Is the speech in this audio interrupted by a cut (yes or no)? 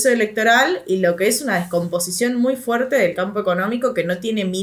no